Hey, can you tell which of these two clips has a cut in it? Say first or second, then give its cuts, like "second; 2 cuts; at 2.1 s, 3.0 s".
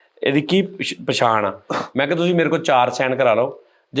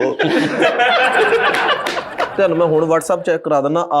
second; 1 cut; at 2.3 s